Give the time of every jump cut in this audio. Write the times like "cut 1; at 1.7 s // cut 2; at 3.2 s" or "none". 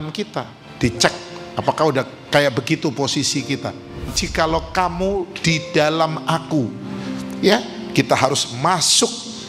cut 1; at 4.2 s